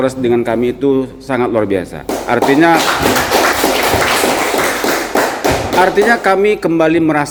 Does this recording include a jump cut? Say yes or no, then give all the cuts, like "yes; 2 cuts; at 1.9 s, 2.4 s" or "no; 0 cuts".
no; 0 cuts